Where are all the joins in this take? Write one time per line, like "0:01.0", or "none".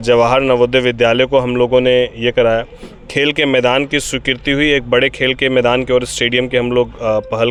none